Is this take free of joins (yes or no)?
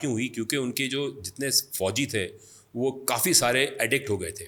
yes